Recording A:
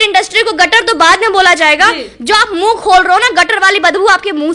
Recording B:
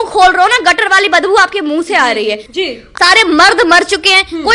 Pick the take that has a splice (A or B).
B